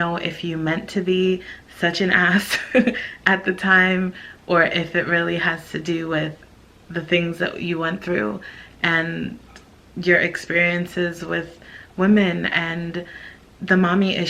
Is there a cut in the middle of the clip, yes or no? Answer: no